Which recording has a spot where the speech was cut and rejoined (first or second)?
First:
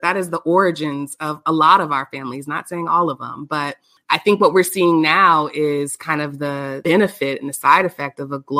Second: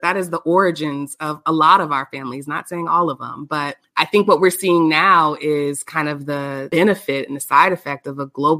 second